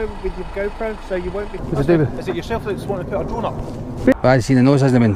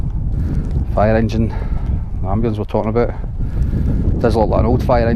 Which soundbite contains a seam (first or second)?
first